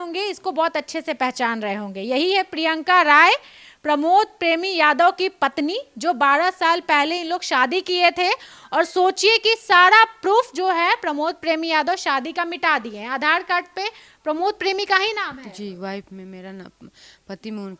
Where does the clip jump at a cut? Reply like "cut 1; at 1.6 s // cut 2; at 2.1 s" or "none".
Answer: none